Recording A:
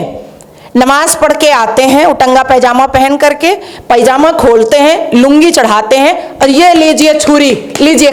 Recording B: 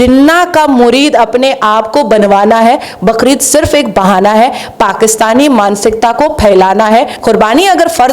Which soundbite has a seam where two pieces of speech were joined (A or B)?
B